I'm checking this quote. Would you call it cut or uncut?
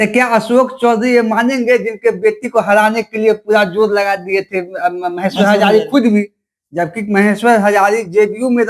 uncut